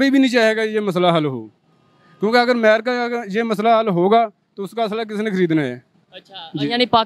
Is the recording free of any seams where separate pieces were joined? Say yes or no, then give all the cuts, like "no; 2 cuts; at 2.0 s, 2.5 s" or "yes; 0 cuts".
yes; 0 cuts